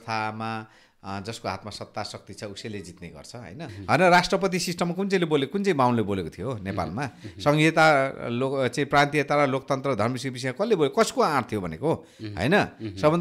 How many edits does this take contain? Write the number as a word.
one